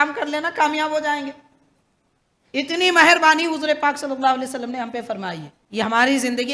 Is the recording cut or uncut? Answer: cut